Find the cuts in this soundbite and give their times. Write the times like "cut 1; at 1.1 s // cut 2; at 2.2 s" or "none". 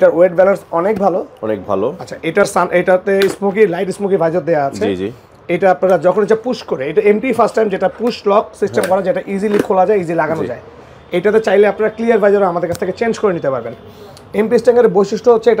none